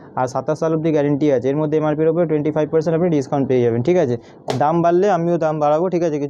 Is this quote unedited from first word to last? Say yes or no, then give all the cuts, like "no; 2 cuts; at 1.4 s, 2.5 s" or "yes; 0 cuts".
yes; 0 cuts